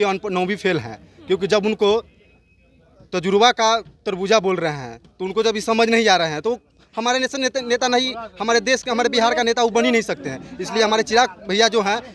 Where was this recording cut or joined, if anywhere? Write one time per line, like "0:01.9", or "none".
none

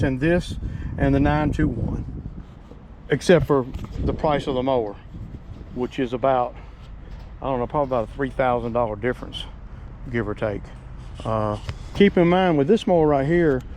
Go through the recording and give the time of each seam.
0:11.9

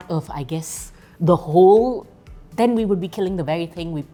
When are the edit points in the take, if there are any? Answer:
none

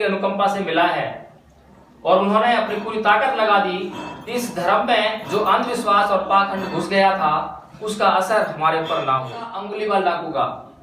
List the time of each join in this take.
0:09.6

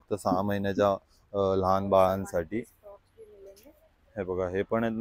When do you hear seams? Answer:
none

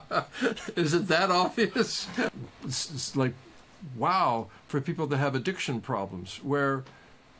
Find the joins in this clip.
0:02.4

